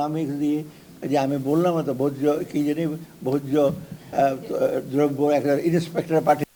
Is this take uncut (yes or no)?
yes